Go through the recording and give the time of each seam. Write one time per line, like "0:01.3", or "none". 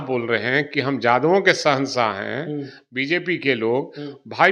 none